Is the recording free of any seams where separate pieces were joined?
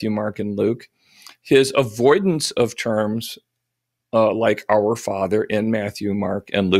yes; 0 cuts

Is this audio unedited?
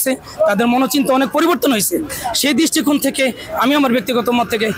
yes; 0 cuts

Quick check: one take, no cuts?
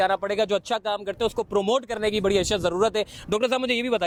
yes; 0 cuts

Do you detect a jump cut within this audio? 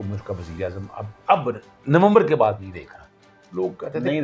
no; 0 cuts

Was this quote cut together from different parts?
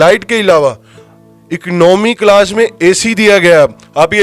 no; 0 cuts

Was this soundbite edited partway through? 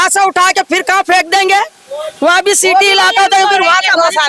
no; 0 cuts

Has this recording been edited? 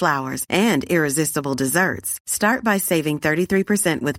no; 0 cuts

